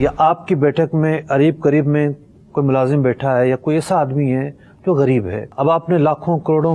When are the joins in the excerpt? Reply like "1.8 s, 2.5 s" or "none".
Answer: 5.4 s